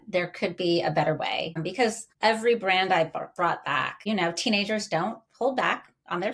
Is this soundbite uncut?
no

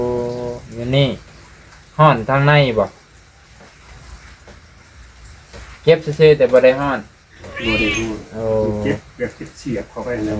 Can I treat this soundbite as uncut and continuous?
yes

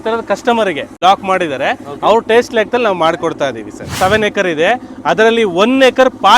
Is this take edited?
yes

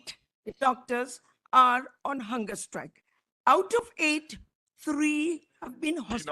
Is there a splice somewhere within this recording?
no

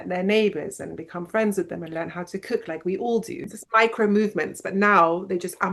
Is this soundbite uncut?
no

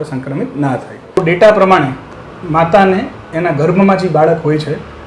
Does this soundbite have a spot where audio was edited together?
yes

